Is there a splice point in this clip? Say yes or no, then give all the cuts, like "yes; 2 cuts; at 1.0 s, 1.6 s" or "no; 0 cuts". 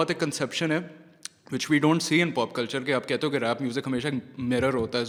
no; 0 cuts